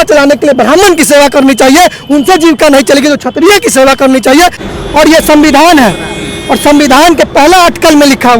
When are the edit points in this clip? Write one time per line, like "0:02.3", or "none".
0:04.6